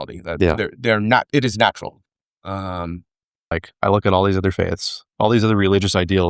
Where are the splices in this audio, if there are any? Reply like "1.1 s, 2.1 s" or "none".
3.5 s

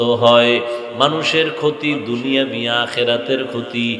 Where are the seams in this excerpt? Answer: none

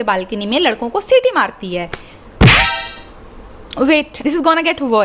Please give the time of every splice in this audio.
none

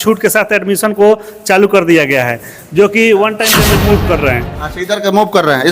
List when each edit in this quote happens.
3.6 s

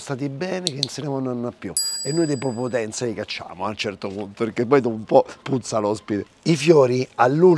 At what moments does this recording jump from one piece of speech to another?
none

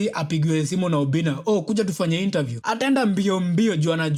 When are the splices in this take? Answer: none

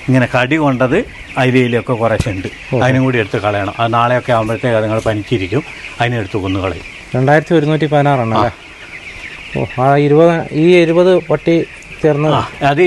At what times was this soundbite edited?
none

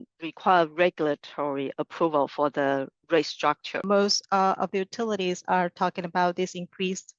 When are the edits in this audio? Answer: 3.8 s

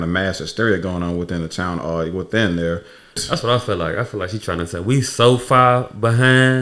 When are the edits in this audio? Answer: 3.2 s

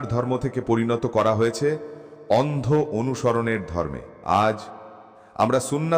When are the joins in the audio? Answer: 4.1 s

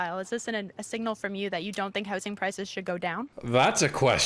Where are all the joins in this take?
3.4 s

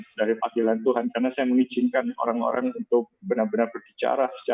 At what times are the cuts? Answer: none

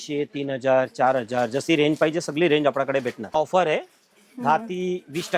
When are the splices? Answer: 3.3 s

